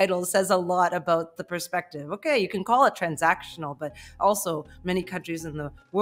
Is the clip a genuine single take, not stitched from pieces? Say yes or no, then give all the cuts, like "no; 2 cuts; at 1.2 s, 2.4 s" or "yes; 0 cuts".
yes; 0 cuts